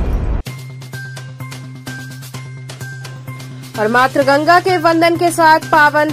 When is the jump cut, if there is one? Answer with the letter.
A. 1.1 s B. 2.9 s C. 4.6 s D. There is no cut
B